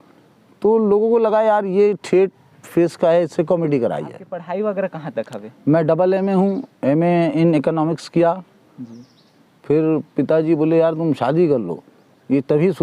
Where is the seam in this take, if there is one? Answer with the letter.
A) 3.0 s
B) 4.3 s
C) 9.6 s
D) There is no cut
B